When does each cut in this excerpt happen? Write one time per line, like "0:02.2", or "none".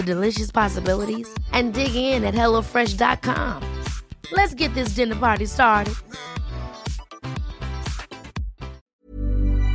0:08.8